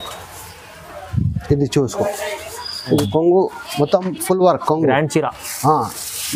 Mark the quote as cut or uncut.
cut